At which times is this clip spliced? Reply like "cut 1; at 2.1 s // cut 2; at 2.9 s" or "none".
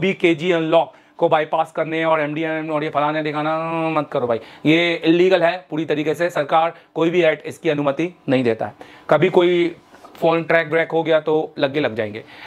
none